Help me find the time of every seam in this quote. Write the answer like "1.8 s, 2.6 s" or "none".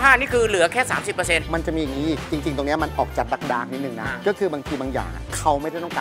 1.4 s